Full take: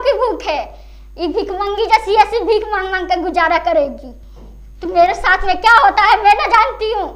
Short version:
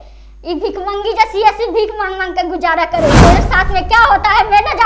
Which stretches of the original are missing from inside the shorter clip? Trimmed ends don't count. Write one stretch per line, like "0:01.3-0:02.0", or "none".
0:03.9-0:04.9